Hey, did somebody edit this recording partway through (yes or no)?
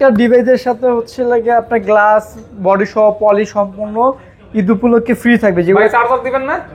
no